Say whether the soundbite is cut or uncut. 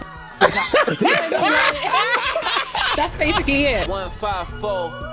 cut